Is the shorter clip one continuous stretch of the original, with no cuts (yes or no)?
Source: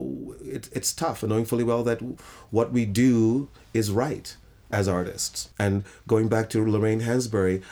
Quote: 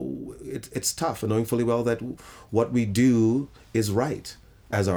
yes